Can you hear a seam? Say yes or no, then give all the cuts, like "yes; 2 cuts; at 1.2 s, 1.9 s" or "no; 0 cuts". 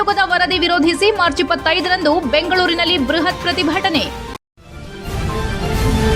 yes; 1 cut; at 4.2 s